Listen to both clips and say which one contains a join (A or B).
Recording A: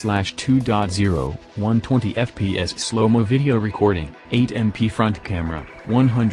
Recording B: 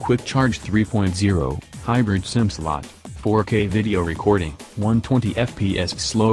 A